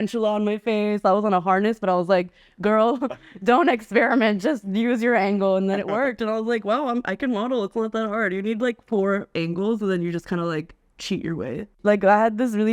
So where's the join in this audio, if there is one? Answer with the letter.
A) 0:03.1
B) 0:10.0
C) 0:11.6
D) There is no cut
C